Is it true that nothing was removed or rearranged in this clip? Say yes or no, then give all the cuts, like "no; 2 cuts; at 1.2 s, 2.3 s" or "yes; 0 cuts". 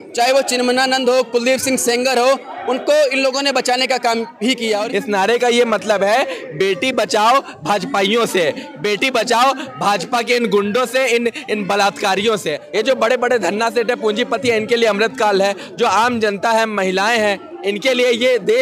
no; 2 cuts; at 4.8 s, 12.6 s